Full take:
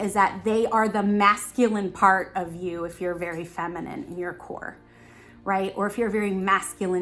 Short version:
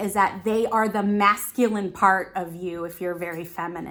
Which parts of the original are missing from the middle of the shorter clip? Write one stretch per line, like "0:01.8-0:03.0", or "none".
none